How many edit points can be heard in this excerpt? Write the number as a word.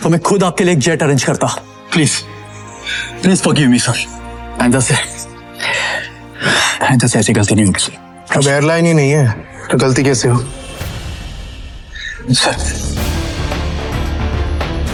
zero